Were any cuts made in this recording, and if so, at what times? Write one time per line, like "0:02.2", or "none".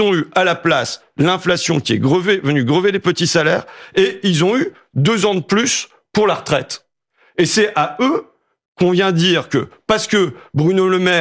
none